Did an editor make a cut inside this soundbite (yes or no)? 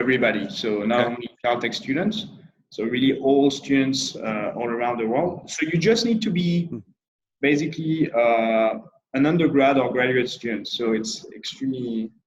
no